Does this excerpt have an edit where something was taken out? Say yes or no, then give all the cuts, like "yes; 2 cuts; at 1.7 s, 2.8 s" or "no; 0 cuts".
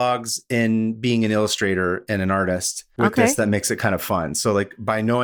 no; 0 cuts